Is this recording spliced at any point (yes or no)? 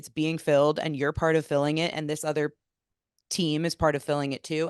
no